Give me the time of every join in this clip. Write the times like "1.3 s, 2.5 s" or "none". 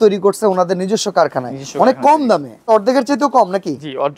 2.7 s